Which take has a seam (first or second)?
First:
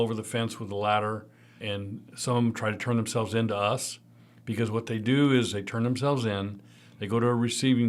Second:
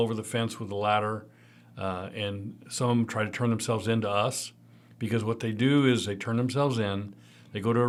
first